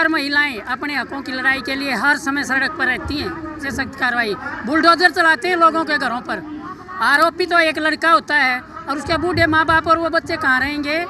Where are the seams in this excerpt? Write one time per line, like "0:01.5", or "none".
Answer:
0:03.6